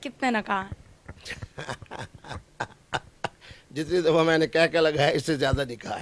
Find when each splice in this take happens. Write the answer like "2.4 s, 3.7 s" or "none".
none